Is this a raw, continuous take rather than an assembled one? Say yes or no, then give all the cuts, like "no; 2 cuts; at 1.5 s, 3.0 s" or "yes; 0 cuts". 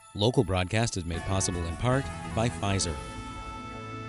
no; 1 cut; at 2.9 s